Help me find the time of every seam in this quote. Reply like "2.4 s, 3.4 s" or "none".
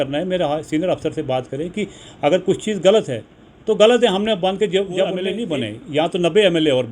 5.3 s